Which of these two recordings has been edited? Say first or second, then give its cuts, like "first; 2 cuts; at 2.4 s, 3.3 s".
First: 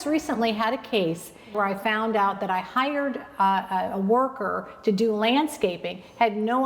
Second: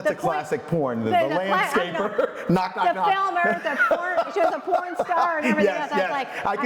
first; 1 cut; at 1.5 s